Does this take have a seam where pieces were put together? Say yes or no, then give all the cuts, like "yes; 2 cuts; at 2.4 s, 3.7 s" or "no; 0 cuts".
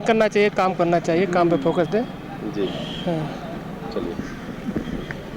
no; 0 cuts